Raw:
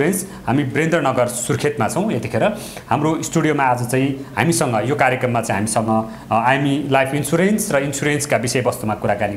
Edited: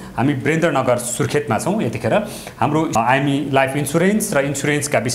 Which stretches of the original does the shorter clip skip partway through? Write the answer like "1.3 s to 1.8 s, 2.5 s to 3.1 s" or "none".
3.2 s to 6.3 s